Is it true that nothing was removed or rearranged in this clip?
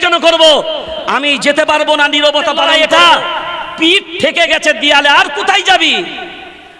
no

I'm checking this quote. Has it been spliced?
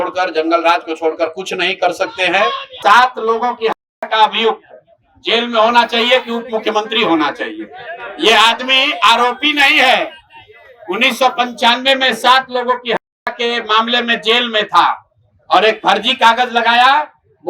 yes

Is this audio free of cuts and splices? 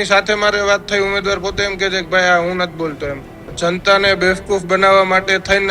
no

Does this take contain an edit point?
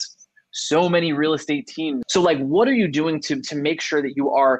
yes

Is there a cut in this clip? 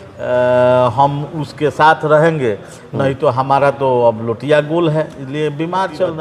no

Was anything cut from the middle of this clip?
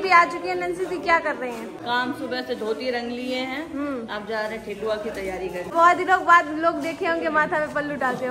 yes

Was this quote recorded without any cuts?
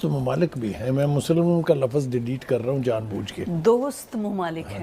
yes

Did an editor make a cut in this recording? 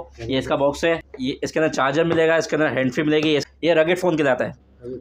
yes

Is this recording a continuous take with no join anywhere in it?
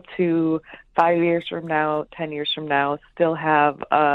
yes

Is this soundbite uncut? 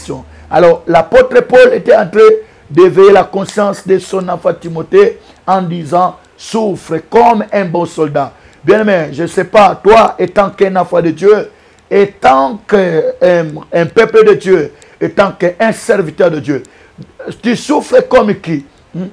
yes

